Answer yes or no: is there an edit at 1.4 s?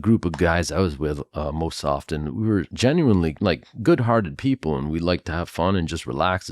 no